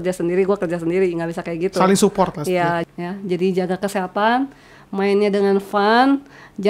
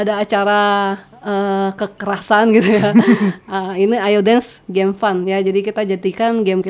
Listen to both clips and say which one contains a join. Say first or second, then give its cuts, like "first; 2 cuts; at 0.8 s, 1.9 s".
first; 1 cut; at 2.8 s